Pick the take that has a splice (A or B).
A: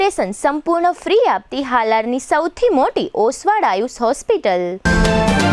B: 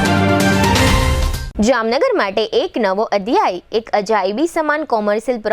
B